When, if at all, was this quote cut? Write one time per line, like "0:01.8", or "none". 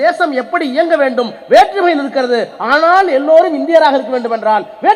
none